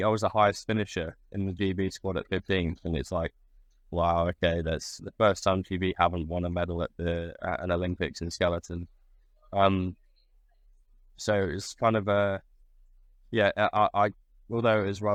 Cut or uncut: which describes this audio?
uncut